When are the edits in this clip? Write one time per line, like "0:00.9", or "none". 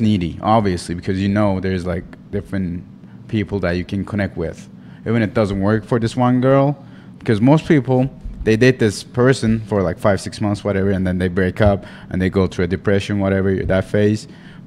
none